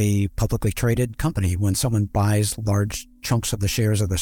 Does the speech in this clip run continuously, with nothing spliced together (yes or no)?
yes